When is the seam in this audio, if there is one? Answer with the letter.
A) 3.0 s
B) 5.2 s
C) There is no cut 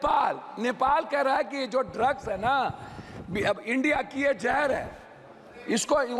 C